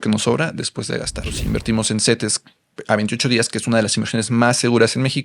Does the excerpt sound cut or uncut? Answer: cut